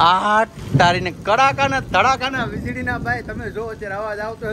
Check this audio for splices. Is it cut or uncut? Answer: uncut